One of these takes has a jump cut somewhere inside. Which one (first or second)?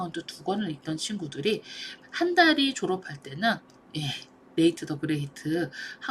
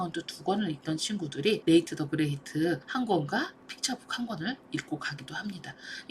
second